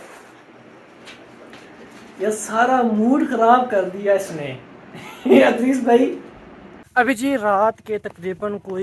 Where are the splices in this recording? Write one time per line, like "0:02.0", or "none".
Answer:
0:06.9

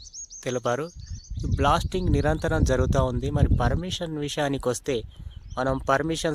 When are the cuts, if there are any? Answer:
none

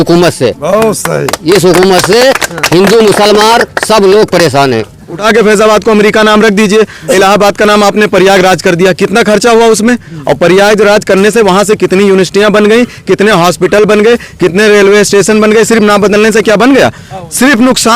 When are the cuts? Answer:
0:05.2
0:07.1

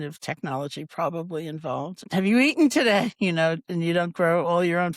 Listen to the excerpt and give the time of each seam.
0:02.0

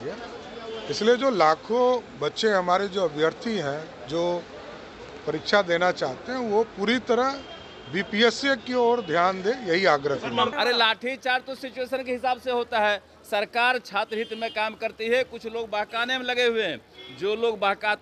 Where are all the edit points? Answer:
0:10.5

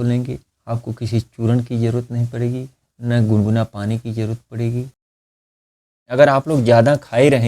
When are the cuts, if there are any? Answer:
0:05.5

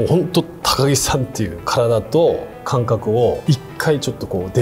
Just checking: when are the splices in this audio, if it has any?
0:01.6
0:03.4

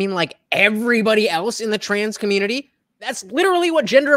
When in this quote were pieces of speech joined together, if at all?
0:03.1

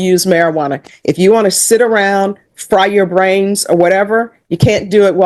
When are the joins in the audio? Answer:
none

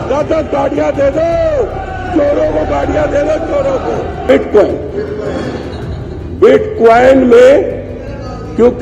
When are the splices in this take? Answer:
0:04.3

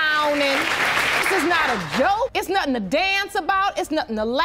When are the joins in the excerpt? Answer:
none

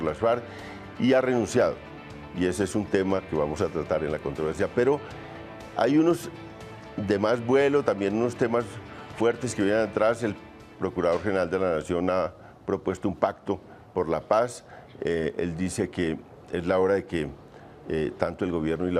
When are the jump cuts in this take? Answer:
0:01.6

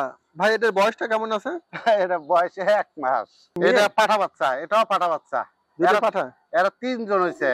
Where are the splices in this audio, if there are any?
0:03.4

